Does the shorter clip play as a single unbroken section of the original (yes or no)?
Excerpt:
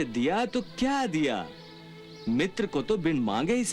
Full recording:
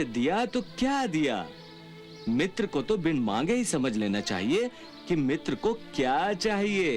yes